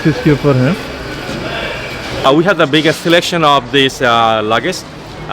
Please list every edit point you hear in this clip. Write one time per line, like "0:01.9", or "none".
0:02.3

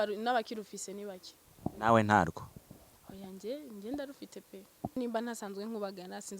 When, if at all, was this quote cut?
0:05.0

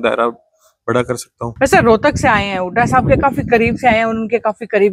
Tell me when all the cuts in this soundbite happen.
0:01.4

